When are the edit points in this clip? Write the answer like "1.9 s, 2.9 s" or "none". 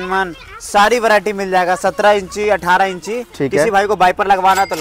3.2 s